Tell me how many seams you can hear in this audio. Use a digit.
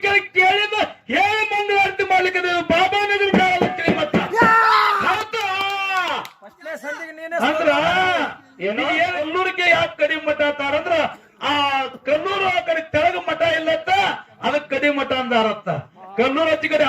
1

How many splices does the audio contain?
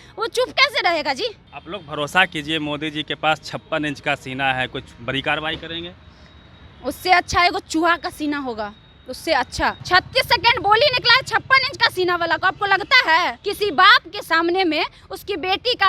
3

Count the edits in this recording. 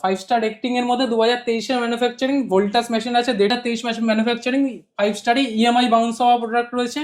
1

